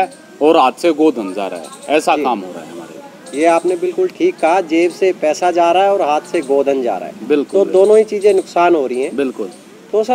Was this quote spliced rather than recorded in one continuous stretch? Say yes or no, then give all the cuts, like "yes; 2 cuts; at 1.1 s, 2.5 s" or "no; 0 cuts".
no; 0 cuts